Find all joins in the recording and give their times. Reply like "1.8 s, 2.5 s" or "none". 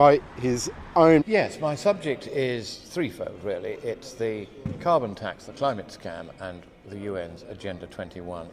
none